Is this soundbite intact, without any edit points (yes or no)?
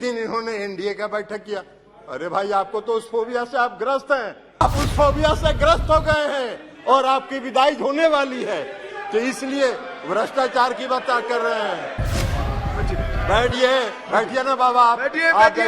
no